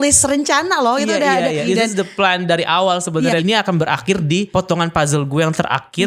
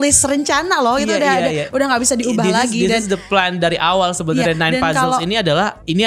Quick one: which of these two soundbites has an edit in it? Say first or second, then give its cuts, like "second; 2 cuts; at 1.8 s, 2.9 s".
first; 3 cuts; at 1.6 s, 3.4 s, 4.5 s